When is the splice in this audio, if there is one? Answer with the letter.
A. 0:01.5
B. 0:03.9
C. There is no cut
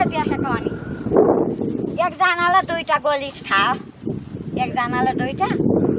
A